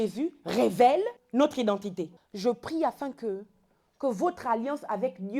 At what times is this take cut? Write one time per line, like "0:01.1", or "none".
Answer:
0:01.2
0:02.2

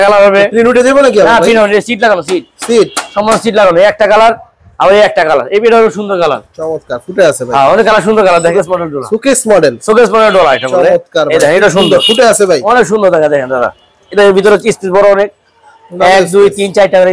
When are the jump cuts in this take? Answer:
0:08.5

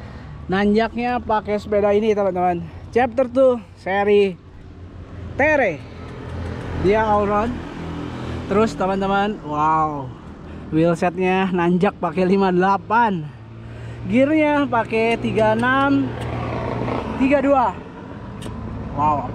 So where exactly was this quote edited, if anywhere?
none

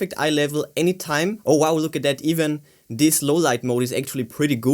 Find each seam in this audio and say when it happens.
0:01.4

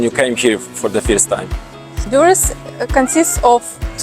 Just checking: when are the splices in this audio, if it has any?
0:01.9

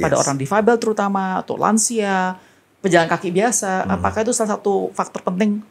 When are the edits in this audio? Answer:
none

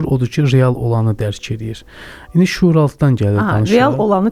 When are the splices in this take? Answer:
none

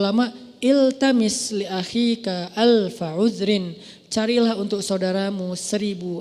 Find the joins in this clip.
none

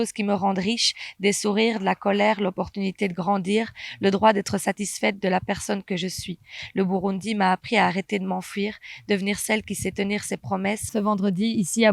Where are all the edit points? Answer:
0:10.9

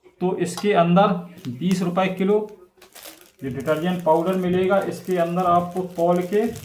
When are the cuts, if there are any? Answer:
none

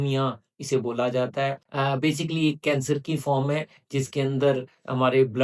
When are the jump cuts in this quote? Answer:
none

